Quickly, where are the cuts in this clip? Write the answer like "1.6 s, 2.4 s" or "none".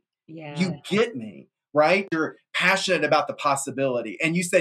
2.1 s